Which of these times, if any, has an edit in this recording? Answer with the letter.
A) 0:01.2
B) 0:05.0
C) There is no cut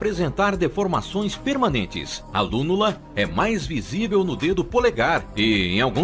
A